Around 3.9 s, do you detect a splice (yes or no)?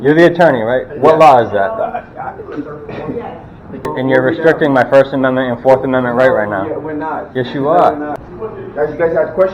yes